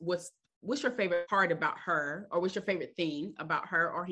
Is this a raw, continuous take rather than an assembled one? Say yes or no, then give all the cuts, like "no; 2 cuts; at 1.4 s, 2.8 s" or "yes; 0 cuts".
no; 1 cut; at 1.3 s